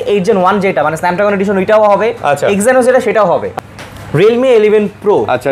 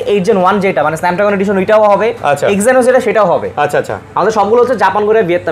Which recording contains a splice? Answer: first; 1 cut; at 3.5 s

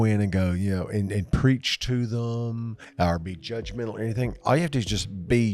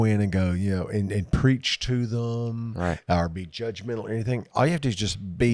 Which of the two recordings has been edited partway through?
first; 1 cut; at 2.8 s

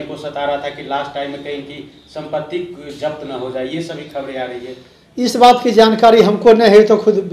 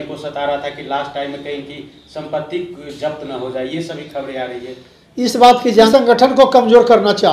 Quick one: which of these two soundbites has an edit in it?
second; 1 cut; at 5.9 s

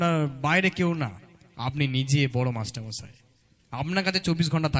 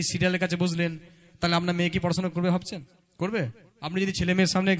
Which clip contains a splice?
second; 2 cuts; at 3.0 s, 3.7 s

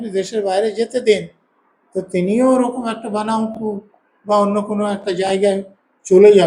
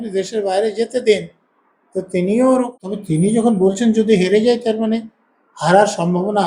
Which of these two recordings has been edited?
second; 1 cut; at 2.8 s

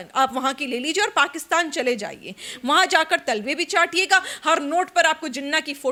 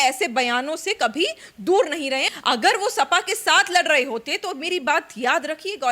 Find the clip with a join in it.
second; 1 cut; at 2.3 s

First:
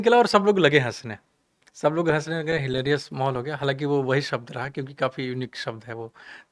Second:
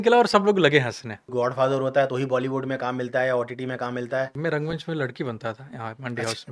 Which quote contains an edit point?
second; 2 cuts; at 1.3 s, 4.3 s

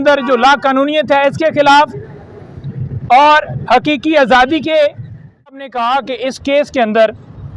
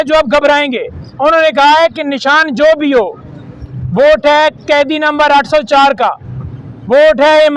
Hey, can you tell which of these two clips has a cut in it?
first; 1 cut; at 5.5 s

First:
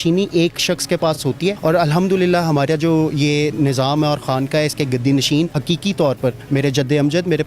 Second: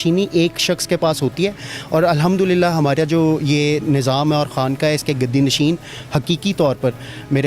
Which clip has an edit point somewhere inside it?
first; 3 cuts; at 1.2 s, 5.6 s, 6.4 s

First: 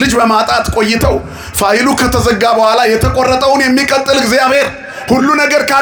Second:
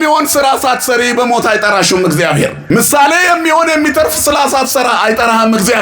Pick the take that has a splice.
second; 1 cut; at 2.6 s

